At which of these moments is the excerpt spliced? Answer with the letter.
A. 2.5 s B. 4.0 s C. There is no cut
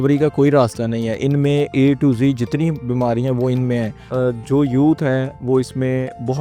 B